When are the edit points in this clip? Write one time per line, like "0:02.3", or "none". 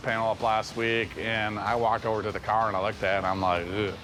none